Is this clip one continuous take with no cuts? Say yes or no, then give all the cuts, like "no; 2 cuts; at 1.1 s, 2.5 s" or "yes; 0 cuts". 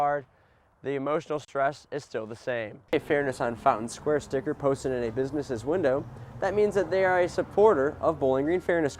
no; 1 cut; at 2.9 s